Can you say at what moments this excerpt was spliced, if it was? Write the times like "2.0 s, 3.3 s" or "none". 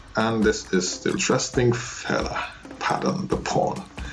1.2 s